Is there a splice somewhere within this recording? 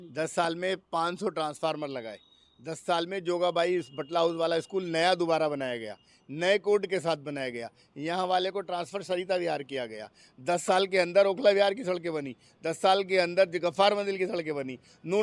no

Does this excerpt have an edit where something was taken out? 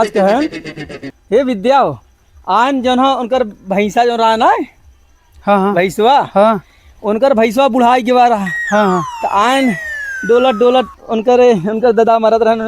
no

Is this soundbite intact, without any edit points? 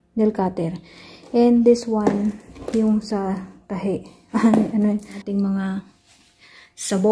no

